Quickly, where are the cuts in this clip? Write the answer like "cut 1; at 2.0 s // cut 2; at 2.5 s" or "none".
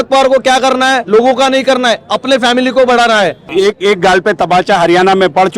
cut 1; at 3.4 s

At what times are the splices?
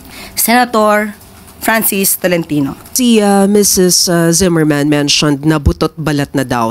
cut 1; at 2.8 s

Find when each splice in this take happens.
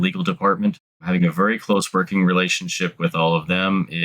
cut 1; at 1.0 s

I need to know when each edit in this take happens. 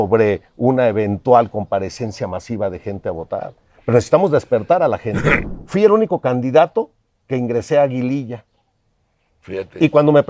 cut 1; at 5.4 s

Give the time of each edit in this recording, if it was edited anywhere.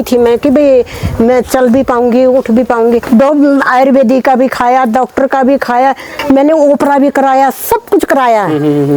cut 1; at 3.0 s // cut 2; at 6.2 s

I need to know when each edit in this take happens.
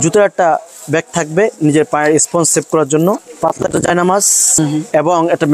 cut 1; at 3.2 s // cut 2; at 4.6 s

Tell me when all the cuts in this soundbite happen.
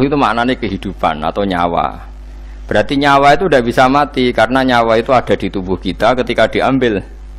none

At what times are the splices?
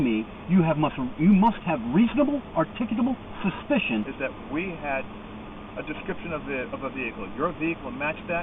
cut 1; at 4.1 s

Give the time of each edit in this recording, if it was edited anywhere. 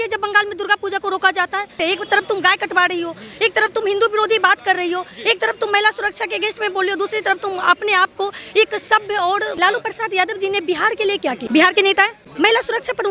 cut 1; at 1.8 s // cut 2; at 9.5 s // cut 3; at 11.4 s // cut 4; at 12.2 s

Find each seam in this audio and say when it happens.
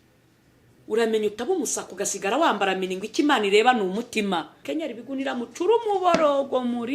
cut 1; at 4.6 s

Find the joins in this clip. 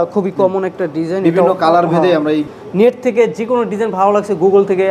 cut 1; at 2.5 s

